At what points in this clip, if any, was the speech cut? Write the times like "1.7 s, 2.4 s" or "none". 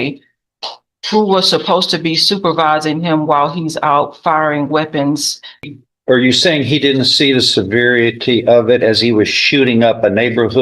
5.7 s